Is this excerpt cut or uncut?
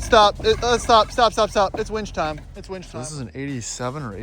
cut